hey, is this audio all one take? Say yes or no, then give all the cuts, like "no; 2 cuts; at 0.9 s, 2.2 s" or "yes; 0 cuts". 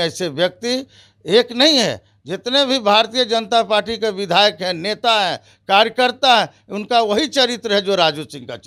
yes; 0 cuts